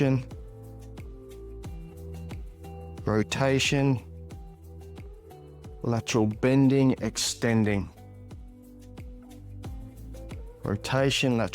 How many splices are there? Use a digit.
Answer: 6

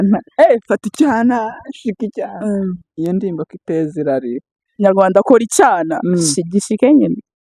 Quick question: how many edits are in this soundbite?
1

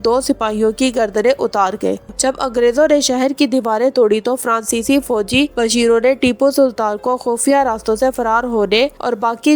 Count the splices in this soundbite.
1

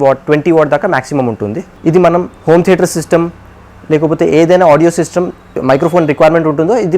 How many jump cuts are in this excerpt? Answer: 2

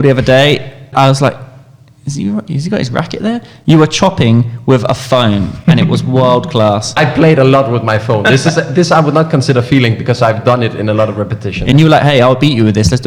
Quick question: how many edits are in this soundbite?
3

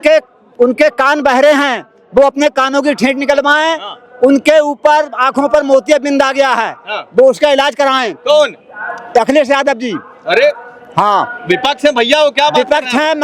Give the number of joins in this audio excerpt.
0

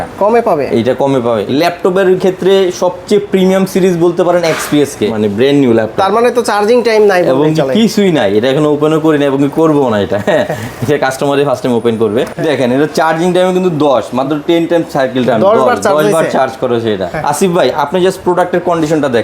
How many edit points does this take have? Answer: 4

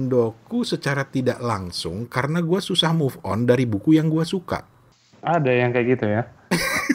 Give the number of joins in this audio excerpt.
0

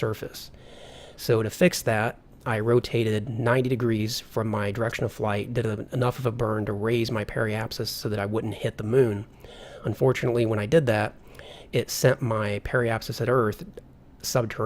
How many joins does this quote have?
1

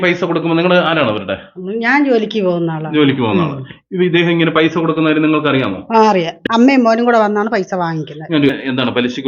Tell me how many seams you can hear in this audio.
0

